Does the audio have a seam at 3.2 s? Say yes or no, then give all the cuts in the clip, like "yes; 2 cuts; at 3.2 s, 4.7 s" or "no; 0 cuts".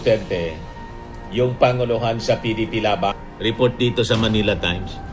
yes; 1 cut; at 3.2 s